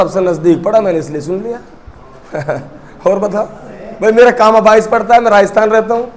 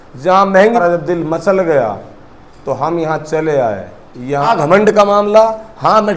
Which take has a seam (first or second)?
second